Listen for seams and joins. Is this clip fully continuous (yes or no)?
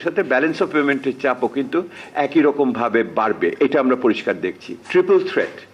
no